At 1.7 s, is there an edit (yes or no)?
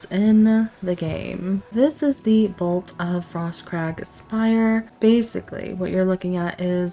yes